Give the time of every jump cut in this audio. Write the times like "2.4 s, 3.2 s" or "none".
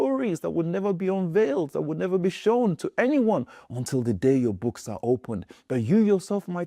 none